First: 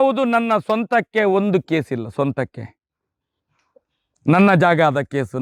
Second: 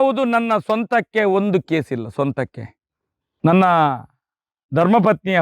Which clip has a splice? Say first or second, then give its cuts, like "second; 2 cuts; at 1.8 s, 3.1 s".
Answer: second; 1 cut; at 3.5 s